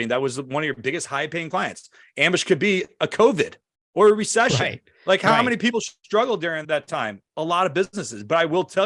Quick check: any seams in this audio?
no; 0 cuts

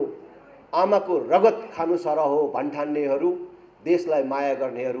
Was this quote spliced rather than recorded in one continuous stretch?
no; 0 cuts

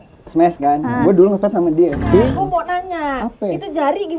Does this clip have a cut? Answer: yes; 1 cut; at 2.2 s

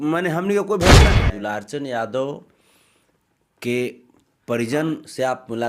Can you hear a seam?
yes; 1 cut; at 1.2 s

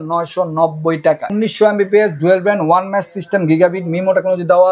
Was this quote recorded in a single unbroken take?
no; 1 cut; at 1.3 s

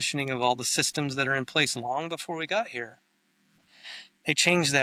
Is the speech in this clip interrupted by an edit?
no; 0 cuts

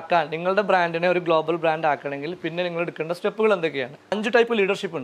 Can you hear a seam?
yes; 1 cut; at 4.1 s

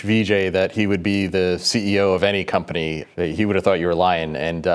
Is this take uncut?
no; 1 cut; at 3.0 s

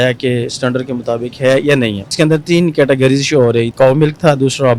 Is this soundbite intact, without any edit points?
no; 2 cuts; at 2.1 s, 3.7 s

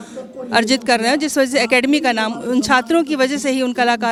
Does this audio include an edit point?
no; 0 cuts

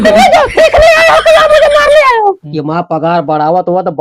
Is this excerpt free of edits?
no; 1 cut; at 2.4 s

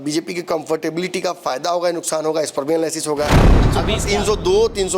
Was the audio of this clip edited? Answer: yes; 1 cut; at 3.6 s

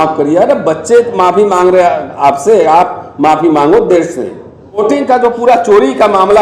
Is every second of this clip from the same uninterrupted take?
no; 1 cut; at 4.8 s

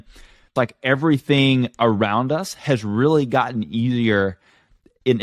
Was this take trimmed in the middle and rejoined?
no; 0 cuts

